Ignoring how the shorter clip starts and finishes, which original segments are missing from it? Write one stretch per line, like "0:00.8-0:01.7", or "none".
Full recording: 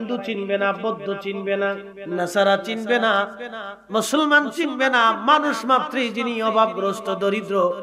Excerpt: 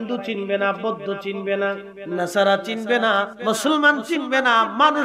0:03.3-0:03.8